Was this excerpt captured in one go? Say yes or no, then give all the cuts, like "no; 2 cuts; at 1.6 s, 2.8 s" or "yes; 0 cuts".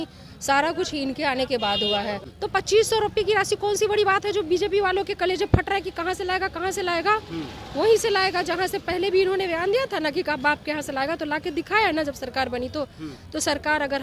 no; 1 cut; at 2.2 s